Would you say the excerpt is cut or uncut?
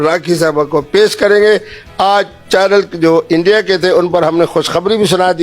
uncut